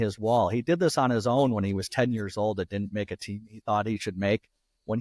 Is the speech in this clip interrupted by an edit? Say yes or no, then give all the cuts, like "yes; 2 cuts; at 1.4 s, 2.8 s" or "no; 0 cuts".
no; 0 cuts